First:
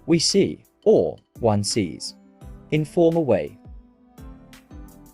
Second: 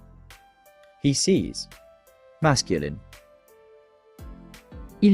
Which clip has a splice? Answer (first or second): second